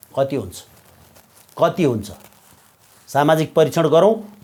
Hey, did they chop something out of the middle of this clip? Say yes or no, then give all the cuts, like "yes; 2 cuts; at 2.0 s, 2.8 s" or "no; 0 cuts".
no; 0 cuts